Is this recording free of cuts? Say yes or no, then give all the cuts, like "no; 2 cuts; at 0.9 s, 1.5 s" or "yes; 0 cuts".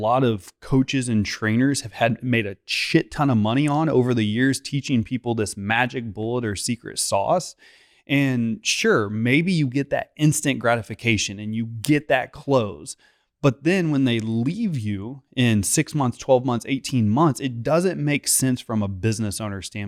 yes; 0 cuts